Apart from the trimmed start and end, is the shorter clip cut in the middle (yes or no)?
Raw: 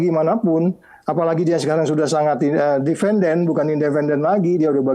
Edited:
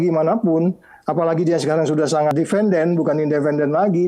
yes